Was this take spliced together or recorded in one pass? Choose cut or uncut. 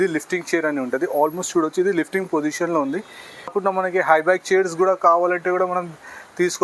cut